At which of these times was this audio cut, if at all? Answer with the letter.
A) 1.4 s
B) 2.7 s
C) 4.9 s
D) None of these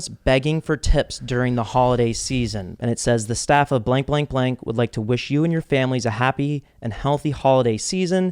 B